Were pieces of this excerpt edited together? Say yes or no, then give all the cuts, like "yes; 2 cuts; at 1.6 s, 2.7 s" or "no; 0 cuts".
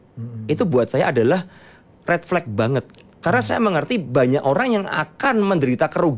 no; 0 cuts